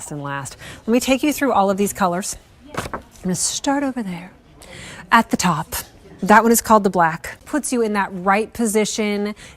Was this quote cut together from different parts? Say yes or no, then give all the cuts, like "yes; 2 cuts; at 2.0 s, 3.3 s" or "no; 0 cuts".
yes; 1 cut; at 7.4 s